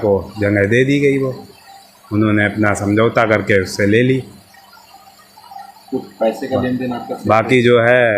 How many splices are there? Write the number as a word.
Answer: one